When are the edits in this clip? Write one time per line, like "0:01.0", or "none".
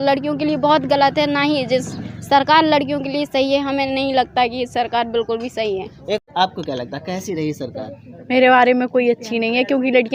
0:06.2